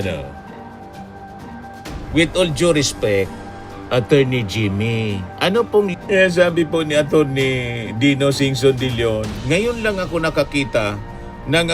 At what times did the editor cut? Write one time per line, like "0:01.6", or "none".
0:05.9

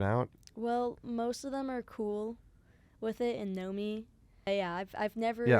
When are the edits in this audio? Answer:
0:04.5

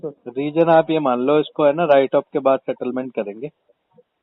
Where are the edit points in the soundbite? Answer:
none

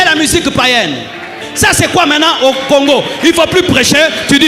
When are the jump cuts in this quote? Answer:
0:01.4

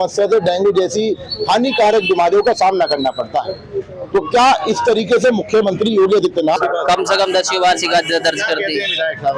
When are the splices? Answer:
0:06.6

